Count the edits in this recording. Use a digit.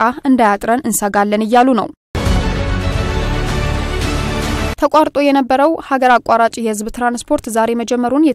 2